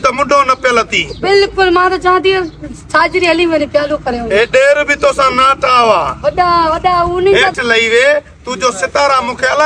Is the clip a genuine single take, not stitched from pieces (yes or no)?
no